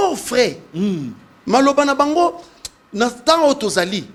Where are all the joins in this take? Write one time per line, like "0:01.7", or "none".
none